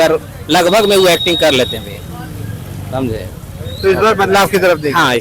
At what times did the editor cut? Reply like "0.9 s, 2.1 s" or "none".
none

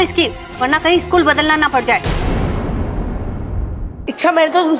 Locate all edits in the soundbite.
3.9 s

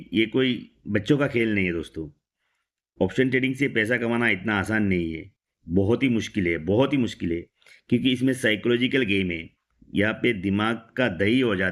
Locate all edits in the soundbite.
none

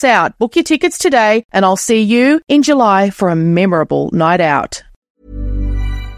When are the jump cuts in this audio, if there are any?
5.1 s

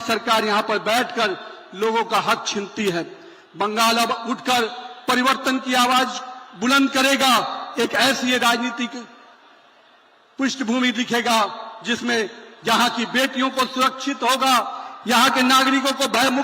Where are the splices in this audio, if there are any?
none

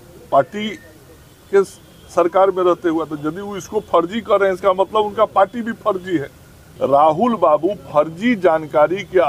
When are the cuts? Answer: 6.6 s

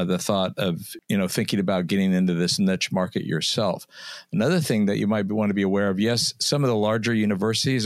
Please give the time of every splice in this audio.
0.9 s

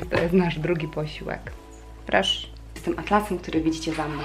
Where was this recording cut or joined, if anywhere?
1.5 s, 2.7 s

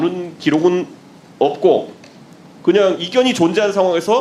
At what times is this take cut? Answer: none

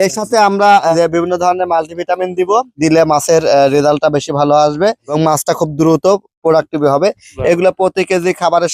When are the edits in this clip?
none

